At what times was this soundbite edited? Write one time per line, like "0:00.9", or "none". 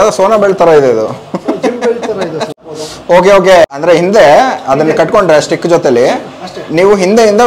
0:02.7
0:03.7

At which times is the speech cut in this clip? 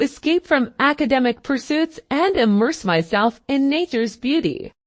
0:02.0

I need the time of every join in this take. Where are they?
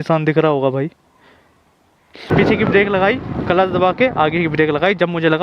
0:02.3

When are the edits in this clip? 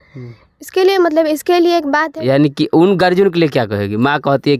0:02.1

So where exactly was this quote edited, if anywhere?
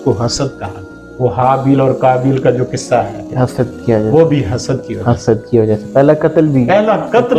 0:01.1

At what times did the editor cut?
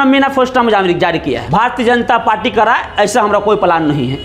0:01.4

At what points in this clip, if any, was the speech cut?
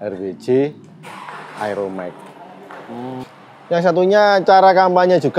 0:03.2

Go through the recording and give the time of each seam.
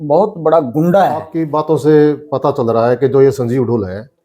0:01.3

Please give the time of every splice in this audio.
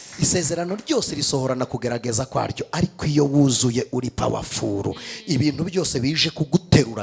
none

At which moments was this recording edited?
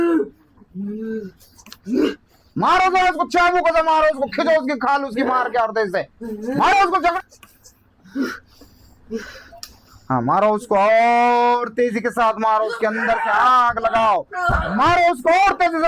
0:07.1

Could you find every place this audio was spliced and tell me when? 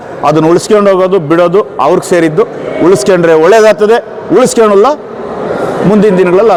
none

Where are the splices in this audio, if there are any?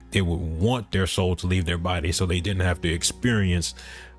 none

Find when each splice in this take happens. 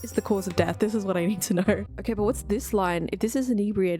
0:01.9

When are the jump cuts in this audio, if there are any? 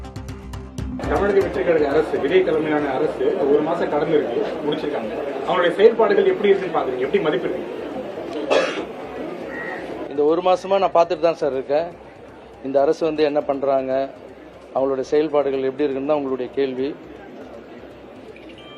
0:01.0

